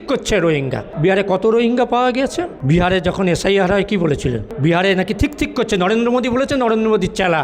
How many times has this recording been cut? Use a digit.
3